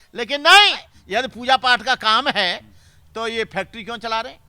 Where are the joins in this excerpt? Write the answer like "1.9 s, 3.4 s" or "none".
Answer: 0.9 s

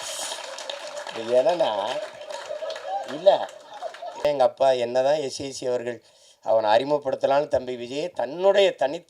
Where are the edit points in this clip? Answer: 4.2 s

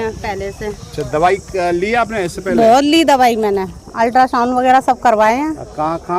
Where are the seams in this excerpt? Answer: none

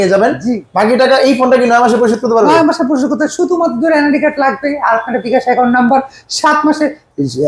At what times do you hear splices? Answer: none

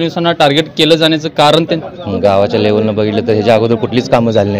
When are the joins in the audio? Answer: 1.9 s

